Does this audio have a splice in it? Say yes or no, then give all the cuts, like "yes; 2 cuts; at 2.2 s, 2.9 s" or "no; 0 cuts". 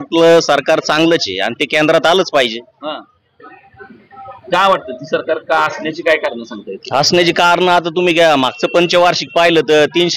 no; 0 cuts